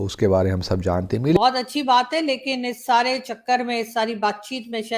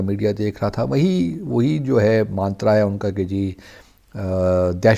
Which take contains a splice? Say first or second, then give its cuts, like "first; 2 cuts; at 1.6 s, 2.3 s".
first; 1 cut; at 1.4 s